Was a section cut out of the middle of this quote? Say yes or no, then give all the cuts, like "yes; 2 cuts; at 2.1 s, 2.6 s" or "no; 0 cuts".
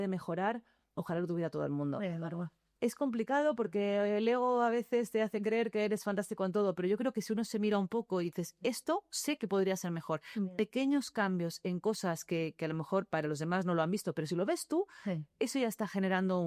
no; 0 cuts